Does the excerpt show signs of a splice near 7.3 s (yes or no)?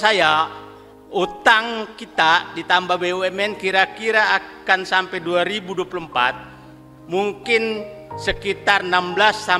no